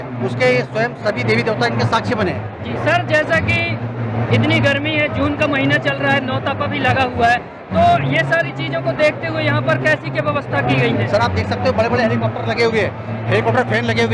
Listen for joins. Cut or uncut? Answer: uncut